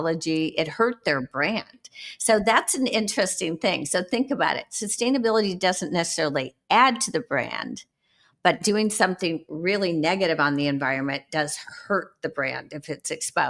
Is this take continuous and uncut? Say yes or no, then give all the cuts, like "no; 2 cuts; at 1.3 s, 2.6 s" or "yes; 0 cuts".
yes; 0 cuts